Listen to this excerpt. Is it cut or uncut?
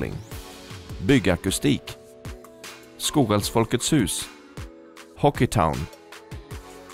uncut